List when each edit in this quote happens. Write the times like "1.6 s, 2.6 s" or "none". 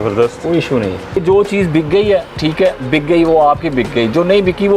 1.2 s, 2.4 s